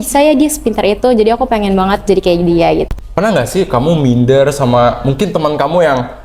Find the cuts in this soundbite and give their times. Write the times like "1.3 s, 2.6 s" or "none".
3.0 s